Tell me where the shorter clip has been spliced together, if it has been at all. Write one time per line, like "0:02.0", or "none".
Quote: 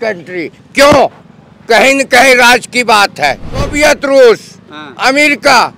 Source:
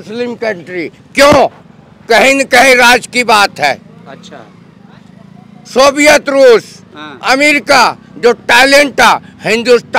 0:03.7